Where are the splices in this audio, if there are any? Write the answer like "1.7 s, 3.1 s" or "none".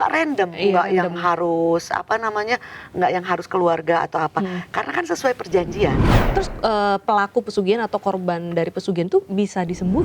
6.2 s

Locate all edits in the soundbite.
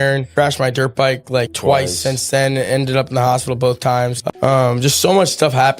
4.3 s

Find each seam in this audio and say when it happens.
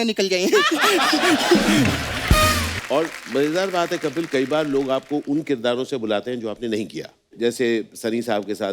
2.7 s

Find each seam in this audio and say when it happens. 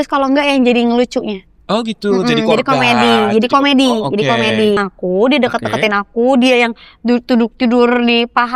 4.8 s

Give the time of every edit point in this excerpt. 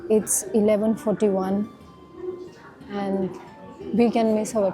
none

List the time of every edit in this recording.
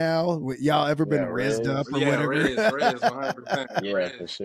none

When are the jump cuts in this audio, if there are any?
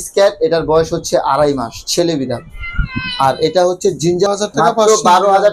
4.3 s

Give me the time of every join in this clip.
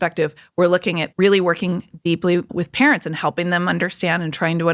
1.1 s, 2.5 s

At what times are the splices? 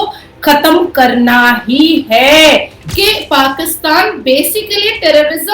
2.8 s

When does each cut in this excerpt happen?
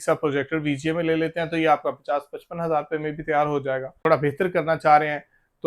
4.0 s

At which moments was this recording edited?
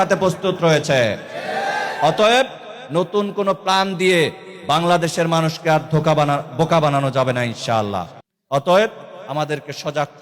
none

